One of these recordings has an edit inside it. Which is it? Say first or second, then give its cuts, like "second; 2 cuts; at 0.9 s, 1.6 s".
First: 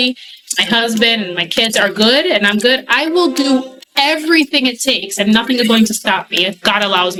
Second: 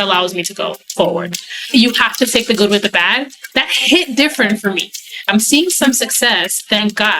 second; 3 cuts; at 1.7 s, 3.5 s, 5.2 s